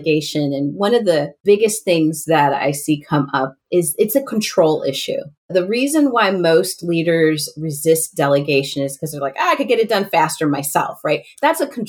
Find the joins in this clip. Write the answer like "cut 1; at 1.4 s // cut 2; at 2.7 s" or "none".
cut 1; at 1.3 s // cut 2; at 5.5 s

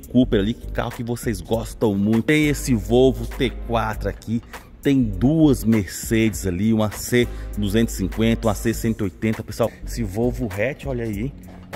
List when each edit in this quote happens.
cut 1; at 2.2 s // cut 2; at 9.8 s

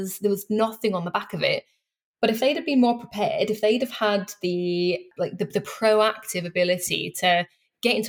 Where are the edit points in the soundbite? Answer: cut 1; at 5.1 s

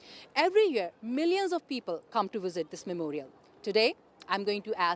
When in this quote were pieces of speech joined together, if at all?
cut 1; at 3.3 s

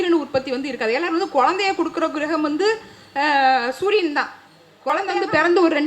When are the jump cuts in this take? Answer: cut 1; at 4.9 s

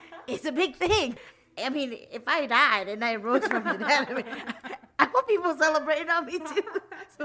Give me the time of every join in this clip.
cut 1; at 1.1 s

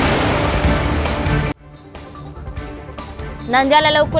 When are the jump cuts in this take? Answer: cut 1; at 2.1 s

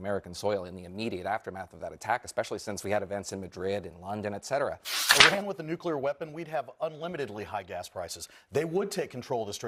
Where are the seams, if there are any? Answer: cut 1; at 5.0 s

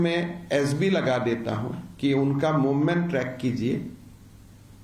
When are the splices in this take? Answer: none

